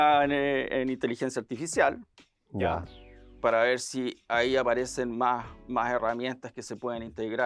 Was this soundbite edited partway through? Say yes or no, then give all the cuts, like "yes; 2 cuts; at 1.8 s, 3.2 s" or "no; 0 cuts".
no; 0 cuts